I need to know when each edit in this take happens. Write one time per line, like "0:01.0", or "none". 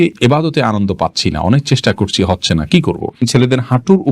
0:03.2